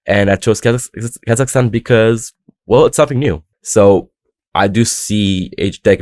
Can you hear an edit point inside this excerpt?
yes; 1 cut; at 3.5 s

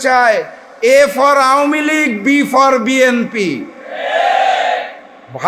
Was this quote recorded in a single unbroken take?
yes; 0 cuts

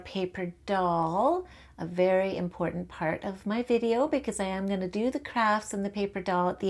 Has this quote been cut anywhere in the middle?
no; 0 cuts

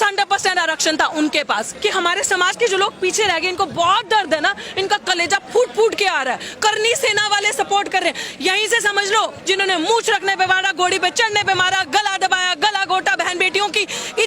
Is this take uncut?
no; 2 cuts; at 1.7 s, 9.4 s

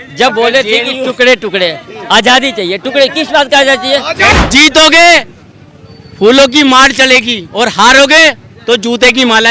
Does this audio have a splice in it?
yes; 1 cut; at 4.3 s

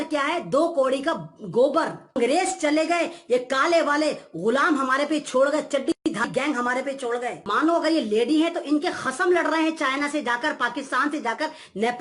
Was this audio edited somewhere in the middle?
yes; 2 cuts; at 2.2 s, 7.4 s

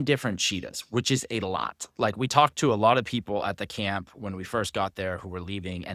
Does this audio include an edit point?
no; 0 cuts

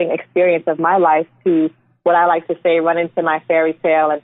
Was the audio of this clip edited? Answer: no; 0 cuts

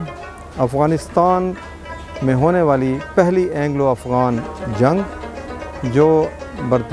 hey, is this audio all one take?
yes; 0 cuts

